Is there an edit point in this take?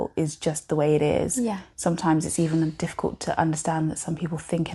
no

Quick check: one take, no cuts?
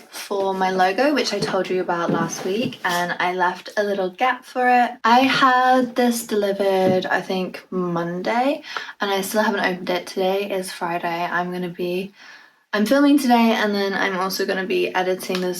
yes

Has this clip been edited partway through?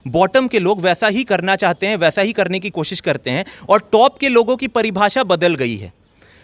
no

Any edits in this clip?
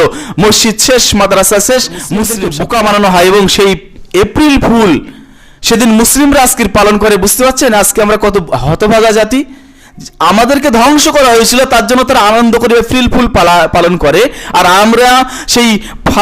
yes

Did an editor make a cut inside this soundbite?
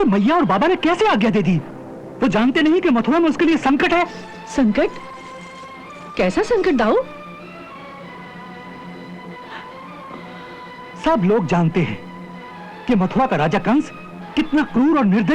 no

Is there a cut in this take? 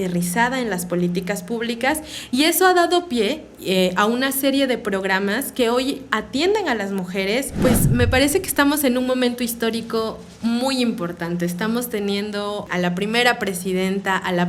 yes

